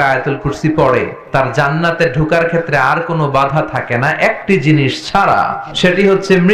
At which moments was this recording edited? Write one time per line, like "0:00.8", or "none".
0:01.2
0:05.6